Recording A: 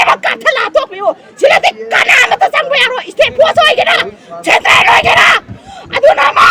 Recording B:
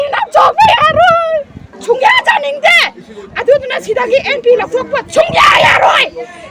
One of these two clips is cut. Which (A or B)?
B